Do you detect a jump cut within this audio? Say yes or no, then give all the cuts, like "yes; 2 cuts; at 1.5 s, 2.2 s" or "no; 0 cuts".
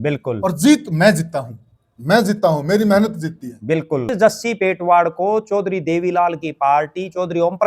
yes; 1 cut; at 4.1 s